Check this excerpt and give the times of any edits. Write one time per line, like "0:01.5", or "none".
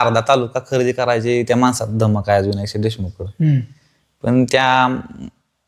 none